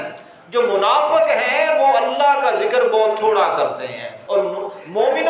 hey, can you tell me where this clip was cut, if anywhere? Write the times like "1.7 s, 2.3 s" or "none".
4.2 s